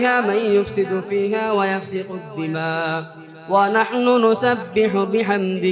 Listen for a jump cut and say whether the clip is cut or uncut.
uncut